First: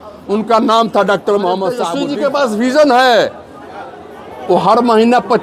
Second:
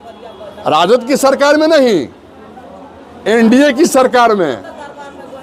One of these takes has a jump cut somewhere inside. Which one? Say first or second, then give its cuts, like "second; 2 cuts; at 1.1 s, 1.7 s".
first; 1 cut; at 2.0 s